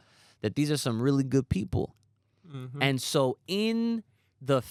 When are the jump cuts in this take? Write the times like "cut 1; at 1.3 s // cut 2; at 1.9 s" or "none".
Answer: none